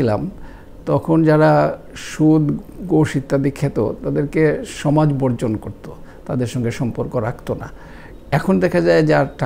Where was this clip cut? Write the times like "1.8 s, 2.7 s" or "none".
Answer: none